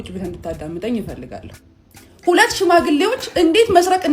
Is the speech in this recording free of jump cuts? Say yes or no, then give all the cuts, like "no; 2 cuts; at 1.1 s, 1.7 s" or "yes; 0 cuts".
no; 1 cut; at 1.5 s